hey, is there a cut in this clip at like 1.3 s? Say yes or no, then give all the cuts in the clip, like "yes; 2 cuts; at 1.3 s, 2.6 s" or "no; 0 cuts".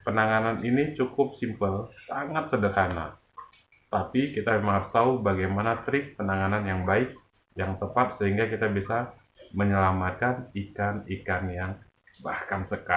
no; 0 cuts